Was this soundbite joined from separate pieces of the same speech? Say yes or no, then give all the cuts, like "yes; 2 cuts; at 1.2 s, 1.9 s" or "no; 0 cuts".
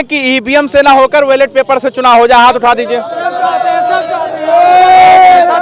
no; 0 cuts